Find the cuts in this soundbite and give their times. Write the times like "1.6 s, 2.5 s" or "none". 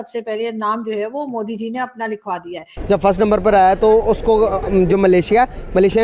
2.7 s